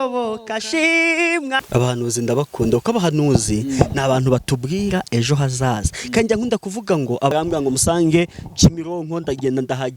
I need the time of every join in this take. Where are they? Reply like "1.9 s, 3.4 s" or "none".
1.6 s, 7.3 s